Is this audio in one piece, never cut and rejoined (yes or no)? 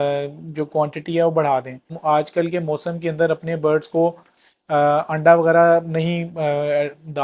no